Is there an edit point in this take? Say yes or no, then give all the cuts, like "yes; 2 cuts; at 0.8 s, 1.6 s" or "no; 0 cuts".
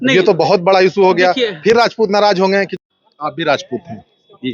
yes; 1 cut; at 2.7 s